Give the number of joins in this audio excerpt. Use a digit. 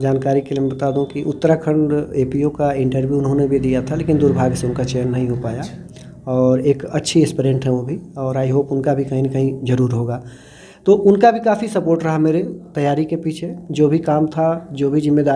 0